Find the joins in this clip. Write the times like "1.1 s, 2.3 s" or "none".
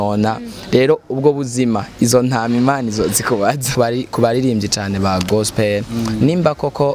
3.7 s

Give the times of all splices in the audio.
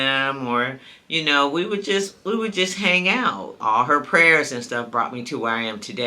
3.5 s

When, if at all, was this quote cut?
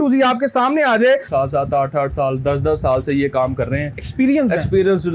1.3 s

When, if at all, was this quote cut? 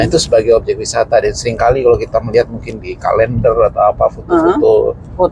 none

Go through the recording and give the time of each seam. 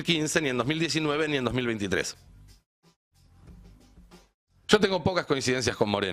2.3 s

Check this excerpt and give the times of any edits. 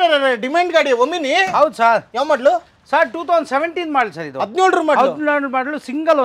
none

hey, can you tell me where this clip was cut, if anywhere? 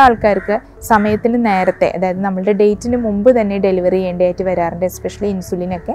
none

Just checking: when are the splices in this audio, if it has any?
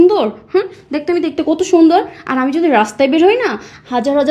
none

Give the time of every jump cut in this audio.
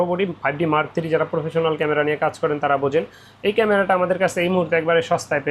none

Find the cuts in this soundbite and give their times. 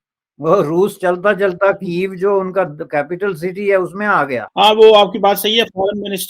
4.5 s

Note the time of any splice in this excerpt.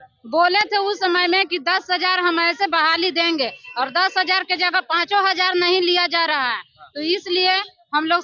none

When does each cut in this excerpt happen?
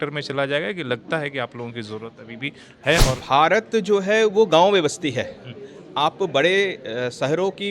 3.1 s

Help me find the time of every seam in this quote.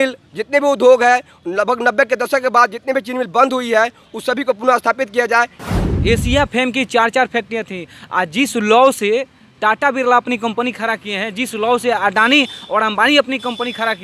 5.6 s

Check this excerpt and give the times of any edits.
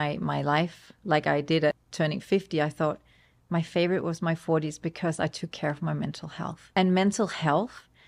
1.9 s, 6.7 s

